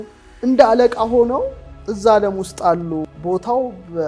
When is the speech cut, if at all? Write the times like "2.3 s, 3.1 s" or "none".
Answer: 3.1 s